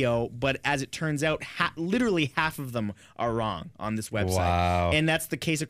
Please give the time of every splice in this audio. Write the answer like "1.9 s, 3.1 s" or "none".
none

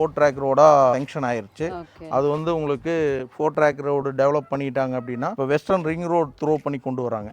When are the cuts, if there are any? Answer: 0.9 s, 5.3 s

